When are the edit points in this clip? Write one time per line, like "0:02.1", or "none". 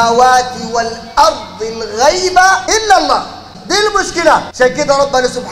0:02.6
0:03.5
0:04.5